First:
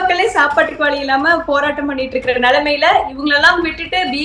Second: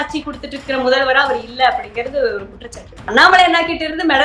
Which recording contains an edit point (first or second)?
second